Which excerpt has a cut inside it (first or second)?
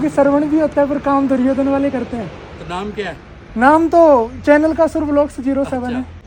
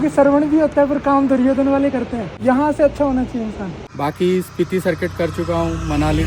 second